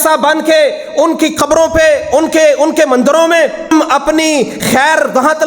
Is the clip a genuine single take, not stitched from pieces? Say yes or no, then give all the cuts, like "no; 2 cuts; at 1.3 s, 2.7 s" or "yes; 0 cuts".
no; 1 cut; at 3.7 s